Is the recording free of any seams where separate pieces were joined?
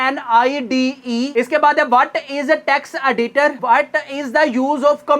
yes; 0 cuts

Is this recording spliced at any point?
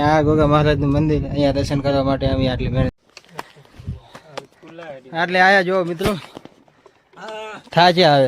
yes; 1 cut; at 2.9 s

